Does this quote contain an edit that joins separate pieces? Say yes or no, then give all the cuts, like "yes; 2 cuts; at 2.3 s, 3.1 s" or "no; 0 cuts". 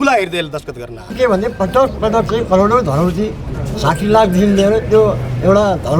yes; 1 cut; at 1.1 s